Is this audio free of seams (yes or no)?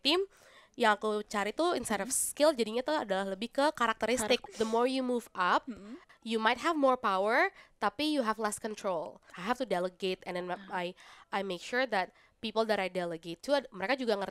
no